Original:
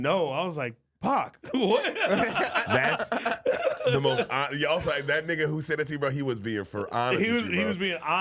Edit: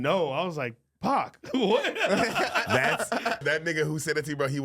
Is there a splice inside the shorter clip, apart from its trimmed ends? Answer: yes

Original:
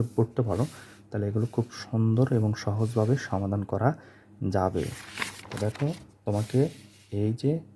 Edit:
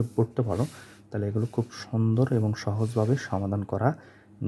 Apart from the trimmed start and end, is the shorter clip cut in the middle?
no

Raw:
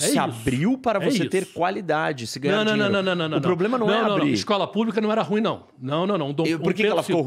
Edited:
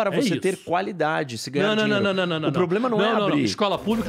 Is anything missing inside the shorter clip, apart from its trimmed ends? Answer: no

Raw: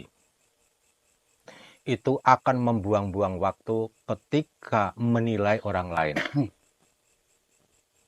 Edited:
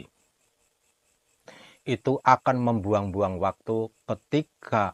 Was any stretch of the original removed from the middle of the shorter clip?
no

